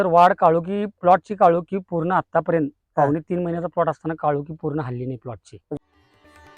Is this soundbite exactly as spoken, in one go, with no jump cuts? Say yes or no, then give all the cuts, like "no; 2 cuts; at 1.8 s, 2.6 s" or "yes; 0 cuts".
no; 1 cut; at 5.5 s